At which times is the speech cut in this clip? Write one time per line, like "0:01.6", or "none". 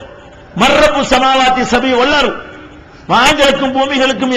0:03.3